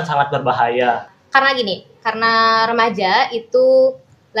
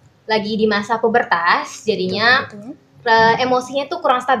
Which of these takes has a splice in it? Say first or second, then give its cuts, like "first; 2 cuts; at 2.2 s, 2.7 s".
first; 1 cut; at 1.1 s